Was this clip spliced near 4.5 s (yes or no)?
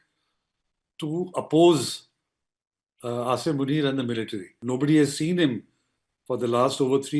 yes